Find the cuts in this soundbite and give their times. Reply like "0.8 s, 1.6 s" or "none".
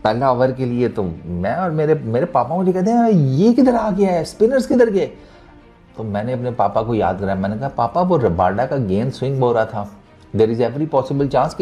none